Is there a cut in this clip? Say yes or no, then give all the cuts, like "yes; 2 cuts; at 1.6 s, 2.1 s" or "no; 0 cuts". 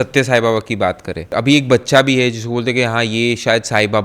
yes; 1 cut; at 1.3 s